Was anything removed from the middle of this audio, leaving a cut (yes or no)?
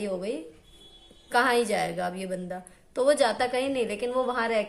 no